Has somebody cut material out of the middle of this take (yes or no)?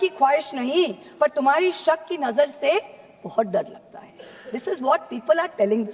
no